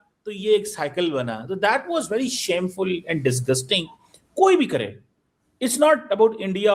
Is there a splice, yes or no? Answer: no